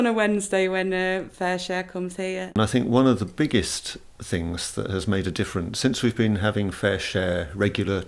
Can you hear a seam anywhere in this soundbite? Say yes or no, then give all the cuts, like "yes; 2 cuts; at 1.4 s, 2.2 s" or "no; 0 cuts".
yes; 1 cut; at 2.4 s